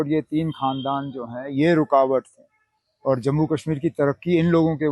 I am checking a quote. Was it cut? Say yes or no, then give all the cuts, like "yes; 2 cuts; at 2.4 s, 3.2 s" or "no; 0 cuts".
no; 0 cuts